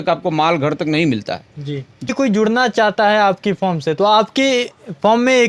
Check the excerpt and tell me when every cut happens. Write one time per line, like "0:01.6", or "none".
none